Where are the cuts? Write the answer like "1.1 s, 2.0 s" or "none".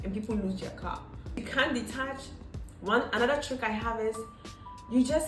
1.5 s